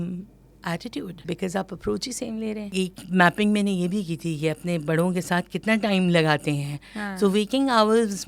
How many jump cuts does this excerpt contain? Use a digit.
2